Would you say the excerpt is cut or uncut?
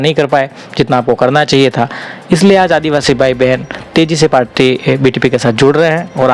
uncut